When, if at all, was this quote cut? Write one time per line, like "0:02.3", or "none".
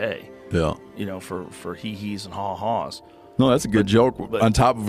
none